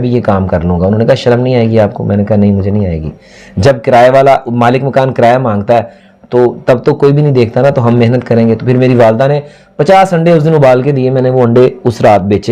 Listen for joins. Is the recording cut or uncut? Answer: uncut